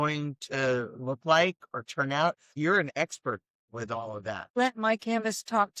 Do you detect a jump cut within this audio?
yes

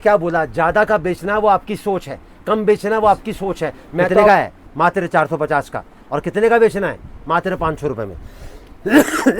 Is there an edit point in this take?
yes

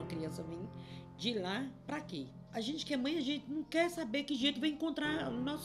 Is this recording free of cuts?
no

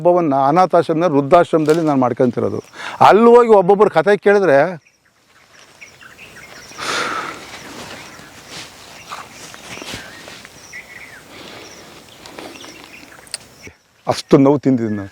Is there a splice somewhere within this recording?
yes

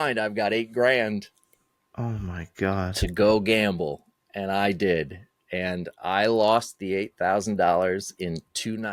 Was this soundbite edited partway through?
no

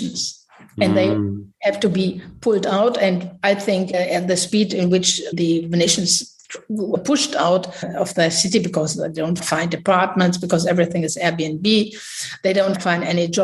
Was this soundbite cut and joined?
no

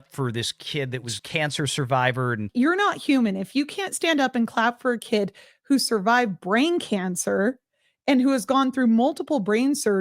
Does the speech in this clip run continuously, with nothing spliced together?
no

